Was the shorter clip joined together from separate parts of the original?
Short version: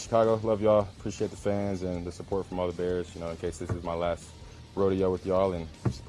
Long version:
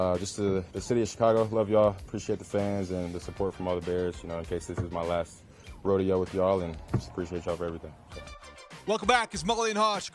no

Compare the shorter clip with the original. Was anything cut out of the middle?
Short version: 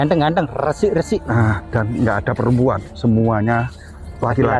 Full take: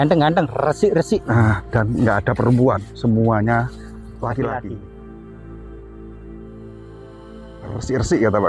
no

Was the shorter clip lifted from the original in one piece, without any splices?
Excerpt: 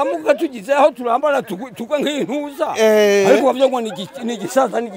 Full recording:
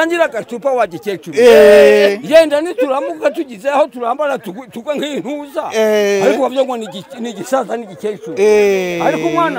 yes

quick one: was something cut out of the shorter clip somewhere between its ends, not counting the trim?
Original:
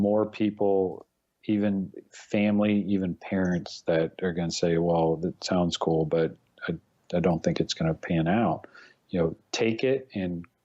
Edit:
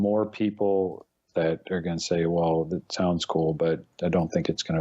yes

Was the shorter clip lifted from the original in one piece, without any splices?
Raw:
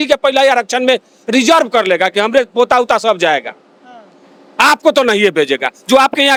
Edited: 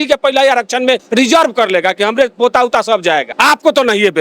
no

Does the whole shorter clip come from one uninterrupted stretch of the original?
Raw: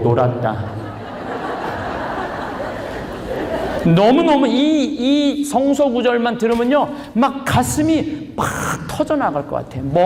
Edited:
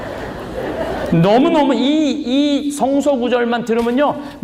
yes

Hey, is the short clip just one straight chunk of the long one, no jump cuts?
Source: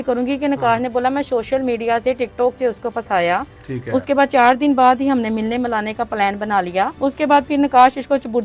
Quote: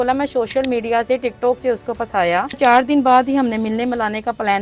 no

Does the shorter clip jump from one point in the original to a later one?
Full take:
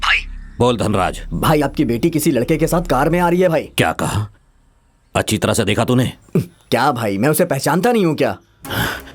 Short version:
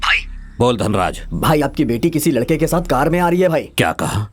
no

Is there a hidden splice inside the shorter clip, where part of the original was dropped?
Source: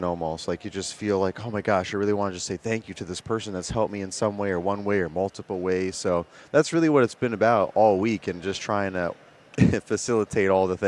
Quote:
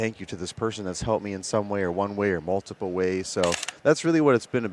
no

